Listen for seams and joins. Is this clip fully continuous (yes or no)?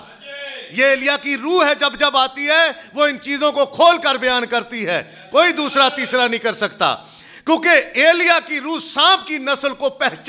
yes